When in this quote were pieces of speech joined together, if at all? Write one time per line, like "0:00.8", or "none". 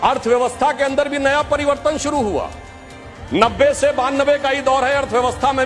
none